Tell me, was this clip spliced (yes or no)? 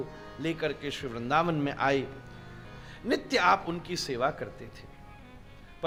no